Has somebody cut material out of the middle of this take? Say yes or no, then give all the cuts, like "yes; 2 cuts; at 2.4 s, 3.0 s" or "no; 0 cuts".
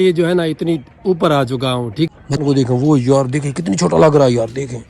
yes; 1 cut; at 2.4 s